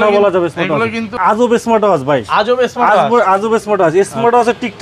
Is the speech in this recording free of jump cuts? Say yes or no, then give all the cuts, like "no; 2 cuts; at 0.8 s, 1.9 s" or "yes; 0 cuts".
no; 1 cut; at 1.1 s